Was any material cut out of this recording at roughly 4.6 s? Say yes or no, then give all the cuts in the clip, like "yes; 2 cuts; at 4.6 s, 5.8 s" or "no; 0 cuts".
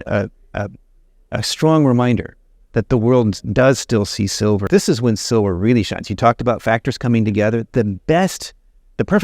yes; 1 cut; at 4.6 s